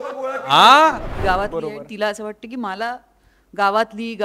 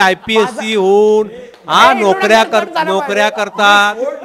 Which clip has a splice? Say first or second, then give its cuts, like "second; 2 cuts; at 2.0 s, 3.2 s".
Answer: first; 1 cut; at 1.1 s